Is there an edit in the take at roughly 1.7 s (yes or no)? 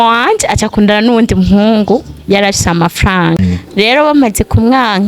no